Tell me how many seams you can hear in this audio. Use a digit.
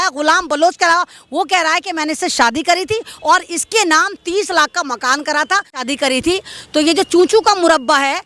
1